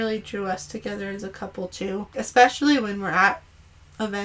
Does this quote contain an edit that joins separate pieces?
yes; 1 cut; at 2.1 s

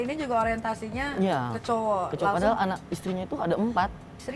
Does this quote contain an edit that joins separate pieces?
no; 0 cuts

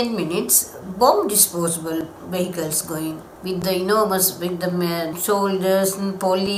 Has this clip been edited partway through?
yes; 2 cuts; at 3.3 s, 5.1 s

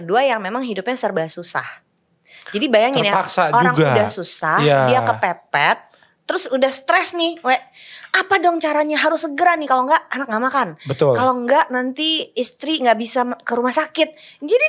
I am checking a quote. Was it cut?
no; 0 cuts

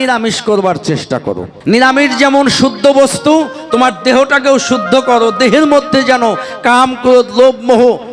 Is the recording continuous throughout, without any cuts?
no; 1 cut; at 1.5 s

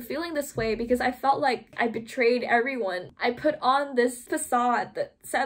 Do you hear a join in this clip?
yes; 2 cuts; at 1.8 s, 3.1 s

